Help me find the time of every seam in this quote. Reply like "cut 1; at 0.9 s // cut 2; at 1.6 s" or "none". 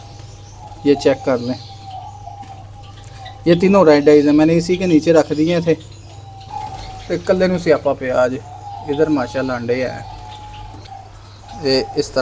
cut 1; at 6.5 s // cut 2; at 10.7 s